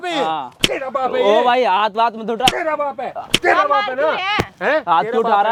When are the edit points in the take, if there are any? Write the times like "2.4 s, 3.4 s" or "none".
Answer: none